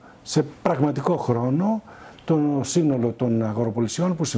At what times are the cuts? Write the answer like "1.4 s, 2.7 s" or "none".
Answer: none